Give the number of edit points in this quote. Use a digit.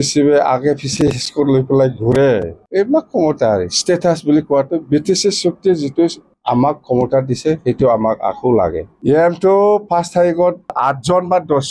1